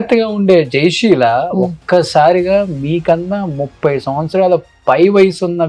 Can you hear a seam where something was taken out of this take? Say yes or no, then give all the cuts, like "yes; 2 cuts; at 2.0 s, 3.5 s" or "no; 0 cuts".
no; 0 cuts